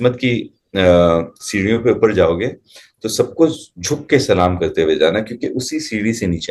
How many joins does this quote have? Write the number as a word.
zero